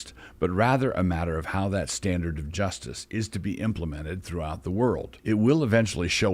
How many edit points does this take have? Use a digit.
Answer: 1